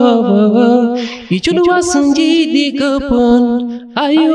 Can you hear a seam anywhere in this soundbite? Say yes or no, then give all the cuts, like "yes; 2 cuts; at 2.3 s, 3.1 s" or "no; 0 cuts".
no; 0 cuts